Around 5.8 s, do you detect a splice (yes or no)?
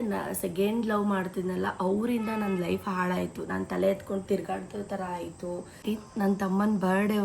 yes